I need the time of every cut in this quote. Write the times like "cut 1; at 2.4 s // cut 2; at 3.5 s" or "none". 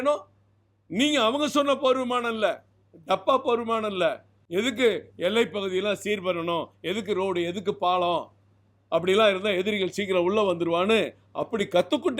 cut 1; at 4.3 s